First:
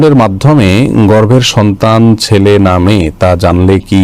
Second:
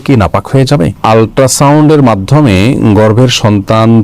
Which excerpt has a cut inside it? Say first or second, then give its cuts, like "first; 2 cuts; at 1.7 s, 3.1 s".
second; 1 cut; at 1.0 s